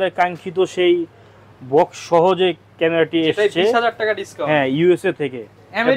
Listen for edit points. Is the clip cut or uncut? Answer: uncut